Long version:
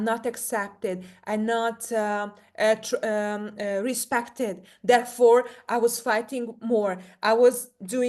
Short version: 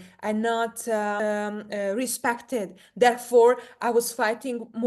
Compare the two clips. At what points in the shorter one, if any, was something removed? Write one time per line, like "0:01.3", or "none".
0:01.2